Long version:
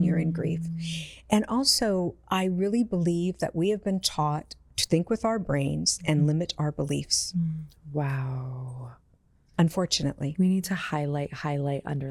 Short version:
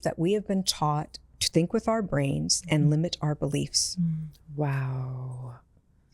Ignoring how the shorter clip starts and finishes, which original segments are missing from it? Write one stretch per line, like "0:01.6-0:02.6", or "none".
none